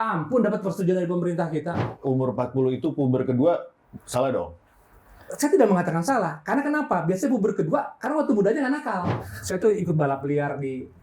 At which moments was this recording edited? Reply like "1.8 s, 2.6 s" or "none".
1.8 s, 9.2 s